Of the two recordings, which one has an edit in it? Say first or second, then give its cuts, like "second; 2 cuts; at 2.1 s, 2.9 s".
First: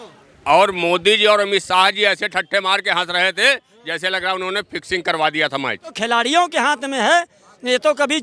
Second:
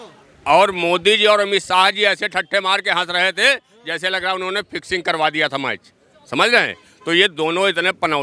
first; 1 cut; at 6.0 s